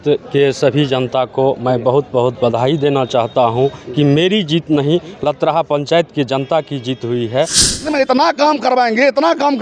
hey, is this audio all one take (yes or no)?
no